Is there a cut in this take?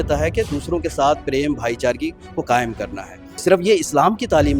yes; 1 cut; at 3.2 s

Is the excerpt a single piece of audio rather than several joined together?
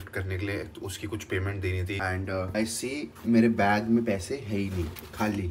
no; 1 cut; at 2.0 s

